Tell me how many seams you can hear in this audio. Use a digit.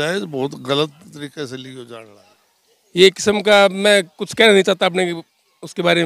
1